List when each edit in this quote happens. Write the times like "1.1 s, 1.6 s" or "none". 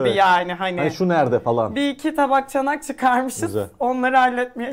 none